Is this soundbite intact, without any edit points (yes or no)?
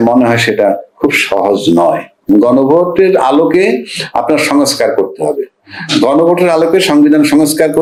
yes